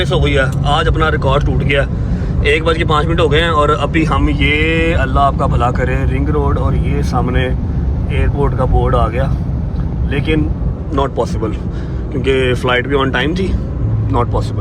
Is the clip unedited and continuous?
yes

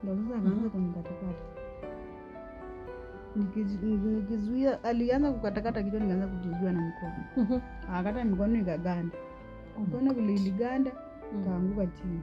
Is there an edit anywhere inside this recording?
no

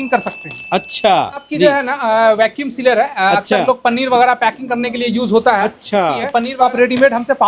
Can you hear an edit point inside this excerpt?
yes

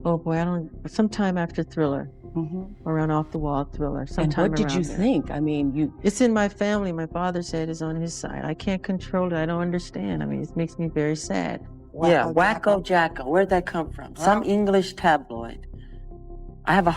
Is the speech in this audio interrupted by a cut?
yes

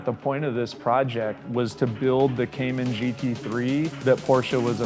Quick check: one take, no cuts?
no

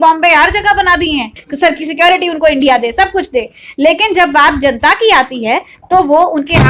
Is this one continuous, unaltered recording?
no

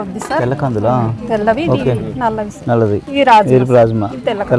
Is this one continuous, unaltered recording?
no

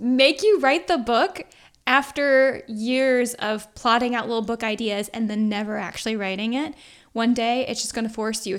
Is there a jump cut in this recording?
no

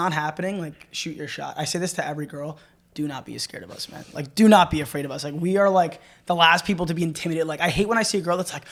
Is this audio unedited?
yes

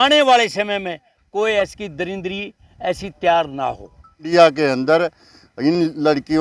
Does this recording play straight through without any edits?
no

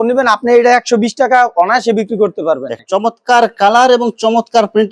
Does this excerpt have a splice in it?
yes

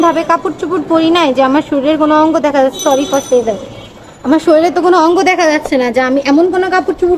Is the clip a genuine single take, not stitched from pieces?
yes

